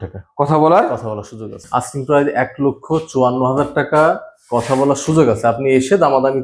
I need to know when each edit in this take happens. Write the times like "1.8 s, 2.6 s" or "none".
1.6 s